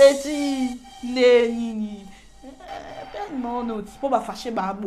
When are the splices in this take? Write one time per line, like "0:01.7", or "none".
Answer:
none